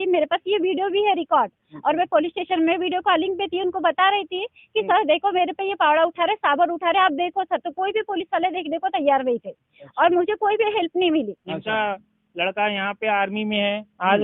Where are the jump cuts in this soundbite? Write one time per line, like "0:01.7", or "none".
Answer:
0:11.4